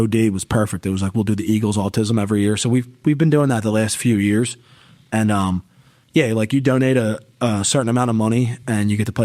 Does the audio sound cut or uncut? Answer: uncut